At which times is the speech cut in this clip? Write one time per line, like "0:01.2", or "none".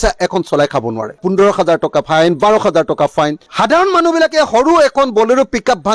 0:03.4